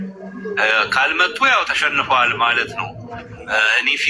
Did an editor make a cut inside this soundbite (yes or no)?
no